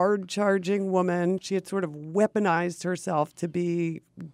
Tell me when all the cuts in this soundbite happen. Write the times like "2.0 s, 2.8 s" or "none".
1.4 s